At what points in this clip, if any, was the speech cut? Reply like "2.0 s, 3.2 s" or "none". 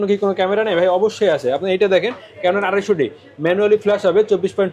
none

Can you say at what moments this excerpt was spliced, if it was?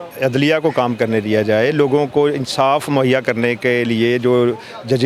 none

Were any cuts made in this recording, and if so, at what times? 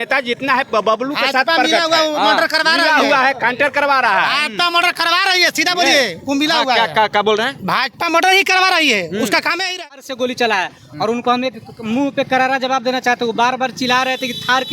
9.7 s

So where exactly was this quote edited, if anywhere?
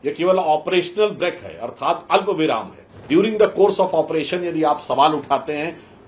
3.1 s

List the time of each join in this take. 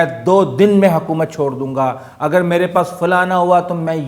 none

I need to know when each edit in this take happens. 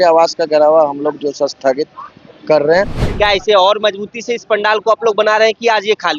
3.0 s

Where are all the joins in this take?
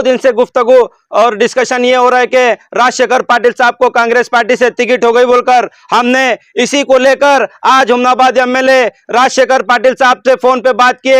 none

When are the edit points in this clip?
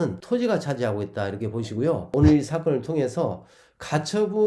2.1 s

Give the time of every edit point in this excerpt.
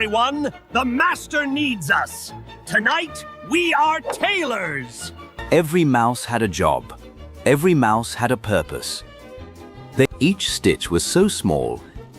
5.3 s, 10.0 s

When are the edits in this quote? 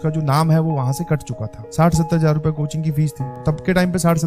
1.6 s, 3.4 s

